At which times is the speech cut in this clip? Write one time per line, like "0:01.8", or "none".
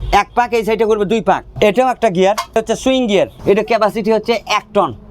0:01.5
0:03.0